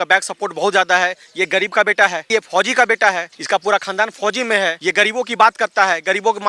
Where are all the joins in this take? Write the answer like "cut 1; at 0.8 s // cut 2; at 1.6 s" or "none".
cut 1; at 2.3 s // cut 2; at 3.3 s // cut 3; at 4.8 s